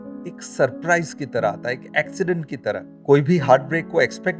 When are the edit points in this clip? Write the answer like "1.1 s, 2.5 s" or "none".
2.9 s